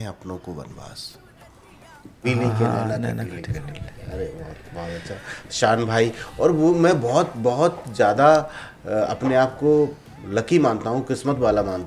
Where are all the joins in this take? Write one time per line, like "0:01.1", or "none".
0:02.2

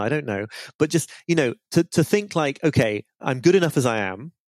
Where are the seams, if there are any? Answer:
0:03.2

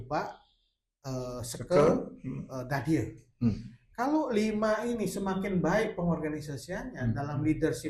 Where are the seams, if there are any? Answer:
none

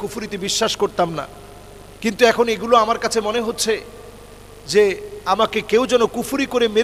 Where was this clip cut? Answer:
none

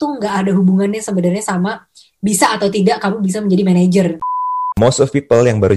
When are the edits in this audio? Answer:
0:04.2

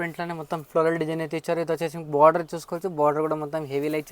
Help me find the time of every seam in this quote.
none

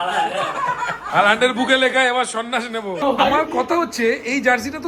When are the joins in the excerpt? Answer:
none

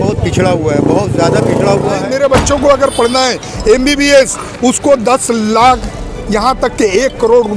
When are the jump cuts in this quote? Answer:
0:02.0

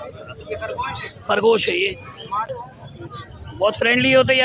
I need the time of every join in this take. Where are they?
0:02.5

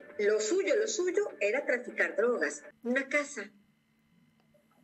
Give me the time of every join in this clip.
0:02.7

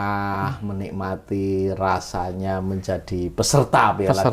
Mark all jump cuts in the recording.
none

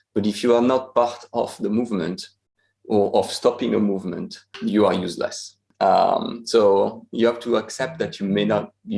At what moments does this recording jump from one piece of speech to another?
0:04.5

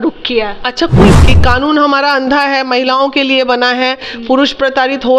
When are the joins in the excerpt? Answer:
0:01.1

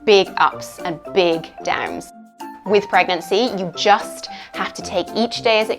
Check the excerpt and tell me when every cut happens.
0:02.4

